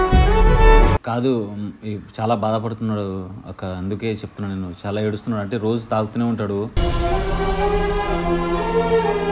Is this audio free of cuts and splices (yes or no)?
no